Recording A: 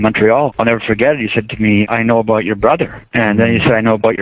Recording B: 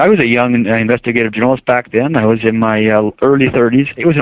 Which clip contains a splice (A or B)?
A